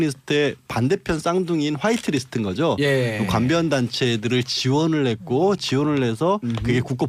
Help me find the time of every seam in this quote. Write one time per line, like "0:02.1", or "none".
none